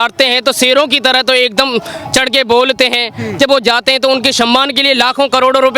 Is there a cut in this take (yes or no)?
no